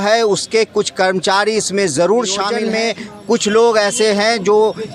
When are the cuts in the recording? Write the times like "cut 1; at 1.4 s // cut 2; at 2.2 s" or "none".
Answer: cut 1; at 2.6 s